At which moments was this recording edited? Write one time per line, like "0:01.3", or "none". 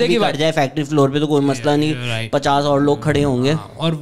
none